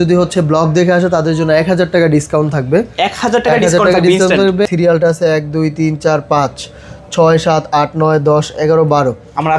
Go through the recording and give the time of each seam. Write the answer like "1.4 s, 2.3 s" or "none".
4.7 s